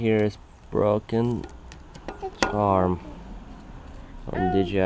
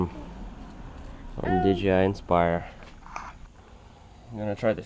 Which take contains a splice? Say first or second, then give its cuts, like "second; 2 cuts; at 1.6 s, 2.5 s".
second; 1 cut; at 3.4 s